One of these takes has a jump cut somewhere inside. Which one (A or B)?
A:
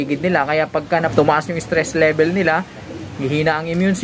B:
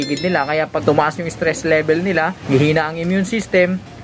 B